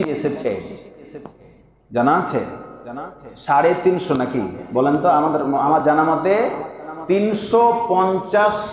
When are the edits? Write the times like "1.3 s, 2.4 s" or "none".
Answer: none